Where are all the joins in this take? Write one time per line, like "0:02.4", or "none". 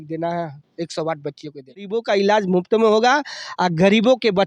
0:01.9